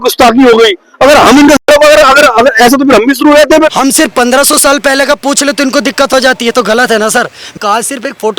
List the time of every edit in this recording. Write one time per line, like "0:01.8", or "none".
0:03.8
0:07.5